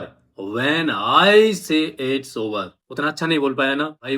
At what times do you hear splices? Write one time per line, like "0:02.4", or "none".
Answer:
none